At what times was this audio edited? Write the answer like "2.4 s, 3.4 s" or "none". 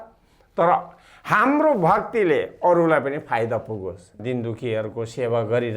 4.2 s